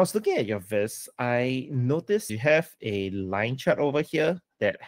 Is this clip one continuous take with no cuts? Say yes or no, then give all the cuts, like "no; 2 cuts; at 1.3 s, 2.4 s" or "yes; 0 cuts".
yes; 0 cuts